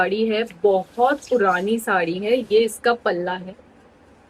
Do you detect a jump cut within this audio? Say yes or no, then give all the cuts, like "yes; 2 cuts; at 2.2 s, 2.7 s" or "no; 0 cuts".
no; 0 cuts